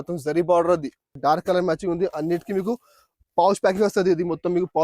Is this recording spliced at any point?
yes; 1 cut; at 1.0 s

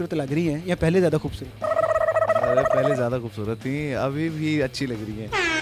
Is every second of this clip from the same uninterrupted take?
yes; 0 cuts

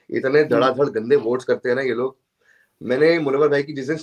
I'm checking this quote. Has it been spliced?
no; 0 cuts

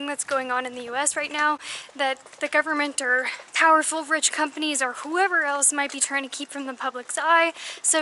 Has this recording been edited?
no; 0 cuts

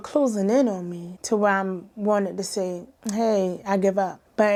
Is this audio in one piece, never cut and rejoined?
yes; 0 cuts

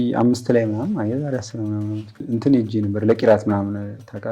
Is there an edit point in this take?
yes; 1 cut; at 2.1 s

